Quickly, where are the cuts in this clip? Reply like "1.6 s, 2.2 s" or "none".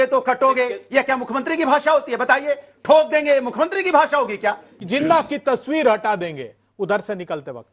4.7 s